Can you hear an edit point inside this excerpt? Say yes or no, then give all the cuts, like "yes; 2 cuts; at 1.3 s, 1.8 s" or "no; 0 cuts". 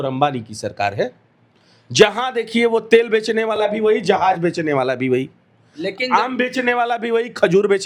no; 0 cuts